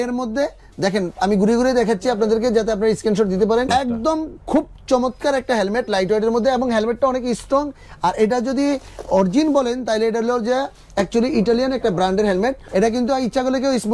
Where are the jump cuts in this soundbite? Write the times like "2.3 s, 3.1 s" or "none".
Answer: 3.7 s, 12.6 s